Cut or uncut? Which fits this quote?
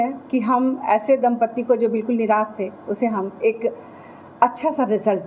uncut